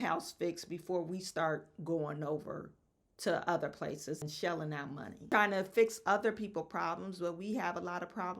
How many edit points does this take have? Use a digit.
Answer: 2